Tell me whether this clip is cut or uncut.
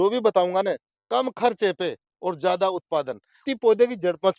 cut